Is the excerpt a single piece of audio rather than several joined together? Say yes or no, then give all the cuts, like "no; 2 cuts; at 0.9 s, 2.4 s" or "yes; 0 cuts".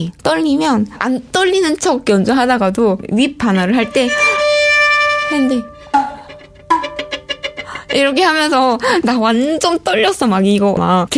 no; 2 cuts; at 0.9 s, 3.0 s